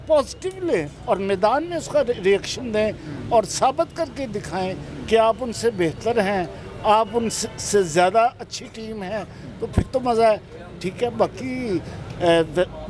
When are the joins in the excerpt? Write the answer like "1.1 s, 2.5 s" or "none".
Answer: none

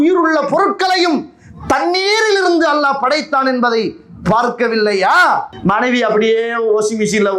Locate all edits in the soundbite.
5.5 s

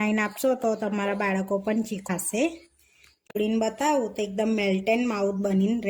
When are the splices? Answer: 2.0 s, 3.4 s

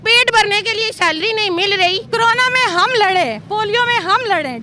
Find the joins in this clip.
2.1 s

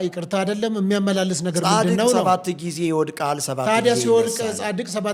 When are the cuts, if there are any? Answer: none

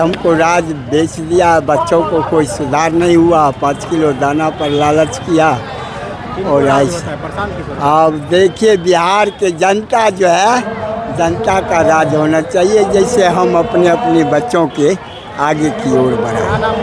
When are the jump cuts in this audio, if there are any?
none

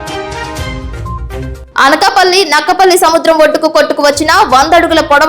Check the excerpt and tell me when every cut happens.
0.9 s

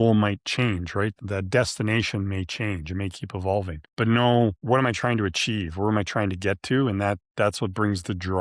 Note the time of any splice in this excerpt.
1.1 s

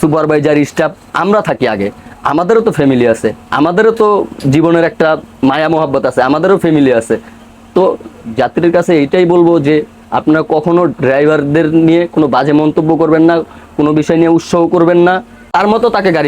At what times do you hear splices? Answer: 15.4 s

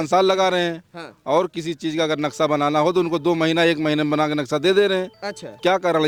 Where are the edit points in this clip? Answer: none

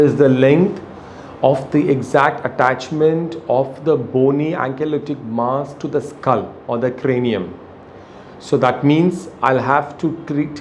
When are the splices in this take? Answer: none

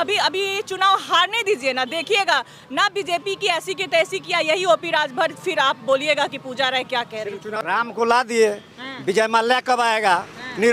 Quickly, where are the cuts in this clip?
7.4 s

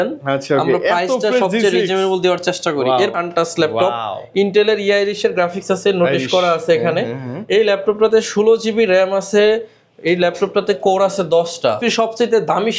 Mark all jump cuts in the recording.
3.1 s, 11.8 s

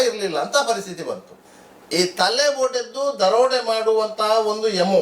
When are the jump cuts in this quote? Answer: 1.3 s

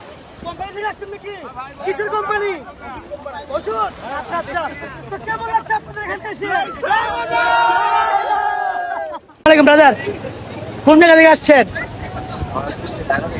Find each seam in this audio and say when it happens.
9.4 s

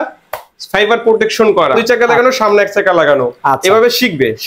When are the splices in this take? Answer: 1.8 s

